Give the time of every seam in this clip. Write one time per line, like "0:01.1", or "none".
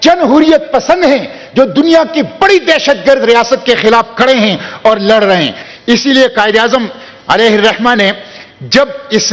0:05.6